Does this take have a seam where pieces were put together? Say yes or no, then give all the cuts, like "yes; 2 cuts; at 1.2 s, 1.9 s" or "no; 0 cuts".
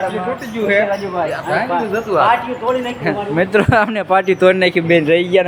no; 0 cuts